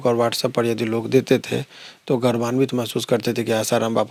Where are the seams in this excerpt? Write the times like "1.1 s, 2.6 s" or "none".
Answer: none